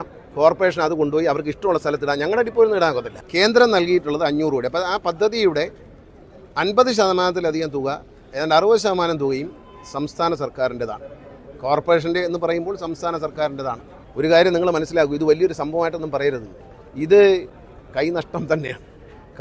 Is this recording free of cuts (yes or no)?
no